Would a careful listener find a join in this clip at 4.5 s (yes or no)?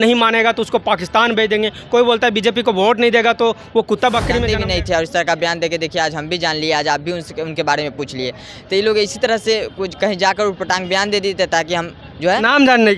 yes